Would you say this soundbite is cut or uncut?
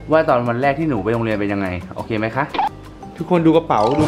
cut